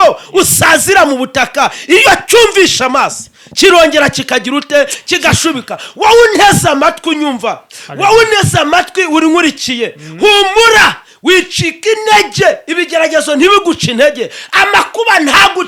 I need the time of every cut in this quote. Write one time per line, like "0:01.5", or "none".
none

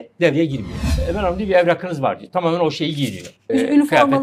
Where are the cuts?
0:01.0
0:03.5

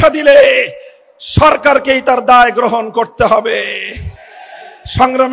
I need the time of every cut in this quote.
none

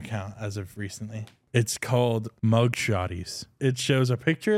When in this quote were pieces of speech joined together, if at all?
0:01.4
0:02.3
0:03.5

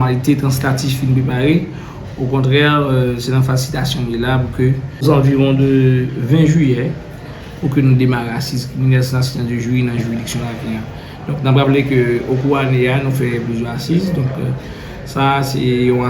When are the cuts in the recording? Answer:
0:05.0

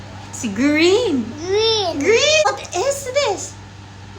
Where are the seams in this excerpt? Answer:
0:02.5

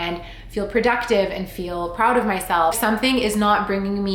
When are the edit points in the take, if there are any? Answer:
0:02.8

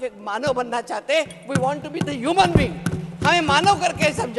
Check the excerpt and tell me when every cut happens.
none

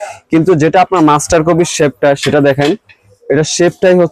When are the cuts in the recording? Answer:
none

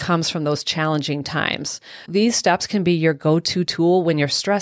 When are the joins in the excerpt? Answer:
0:02.0

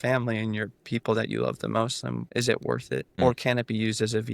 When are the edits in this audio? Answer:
0:02.2
0:03.1

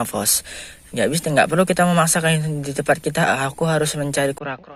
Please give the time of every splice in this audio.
none

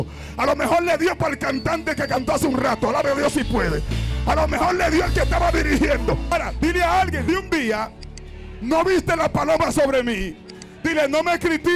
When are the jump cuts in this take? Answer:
0:06.3
0:07.2

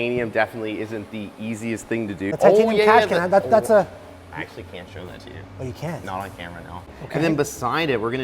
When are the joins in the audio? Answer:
0:02.2
0:07.0

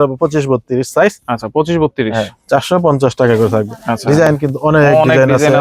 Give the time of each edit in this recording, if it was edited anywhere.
none

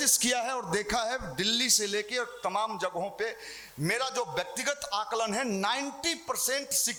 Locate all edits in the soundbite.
none

